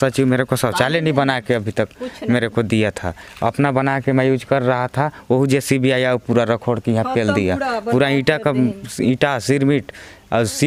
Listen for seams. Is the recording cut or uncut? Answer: uncut